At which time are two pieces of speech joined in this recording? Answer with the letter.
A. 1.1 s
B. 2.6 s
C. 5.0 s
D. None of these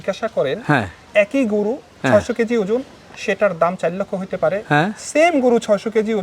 A